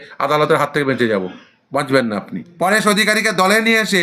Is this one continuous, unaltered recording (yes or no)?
no